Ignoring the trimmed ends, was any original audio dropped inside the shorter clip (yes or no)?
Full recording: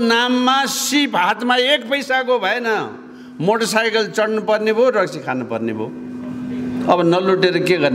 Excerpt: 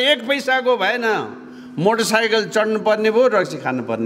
no